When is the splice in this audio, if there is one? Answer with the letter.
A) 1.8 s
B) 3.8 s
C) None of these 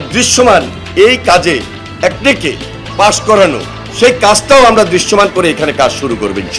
A